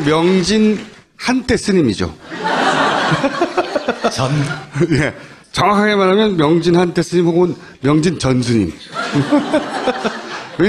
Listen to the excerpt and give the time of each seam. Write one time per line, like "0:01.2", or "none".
0:08.1